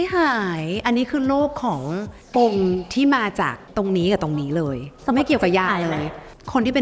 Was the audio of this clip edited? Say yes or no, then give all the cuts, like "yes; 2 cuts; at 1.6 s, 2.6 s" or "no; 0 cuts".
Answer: no; 0 cuts